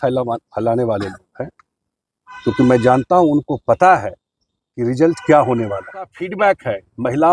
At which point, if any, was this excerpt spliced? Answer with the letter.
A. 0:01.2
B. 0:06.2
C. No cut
B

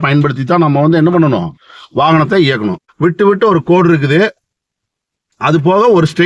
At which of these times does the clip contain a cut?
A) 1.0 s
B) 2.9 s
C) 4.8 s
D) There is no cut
B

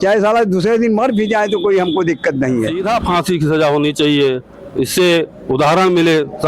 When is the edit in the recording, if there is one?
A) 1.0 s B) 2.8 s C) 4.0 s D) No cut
B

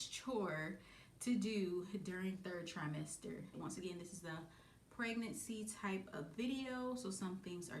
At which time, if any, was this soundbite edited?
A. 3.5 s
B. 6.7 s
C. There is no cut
A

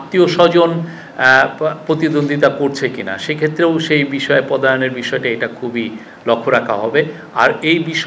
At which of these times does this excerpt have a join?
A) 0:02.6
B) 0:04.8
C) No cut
C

